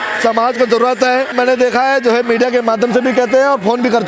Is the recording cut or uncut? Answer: cut